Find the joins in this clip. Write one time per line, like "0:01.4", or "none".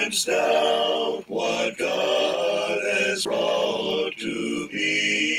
0:03.2